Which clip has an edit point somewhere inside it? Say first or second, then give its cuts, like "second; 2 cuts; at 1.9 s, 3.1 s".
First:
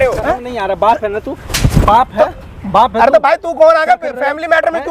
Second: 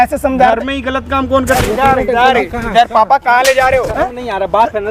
second; 1 cut; at 1.3 s